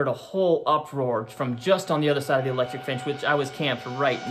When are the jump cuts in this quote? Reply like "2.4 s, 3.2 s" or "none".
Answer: none